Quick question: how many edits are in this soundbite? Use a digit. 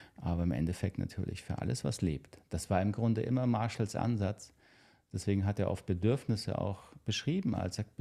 0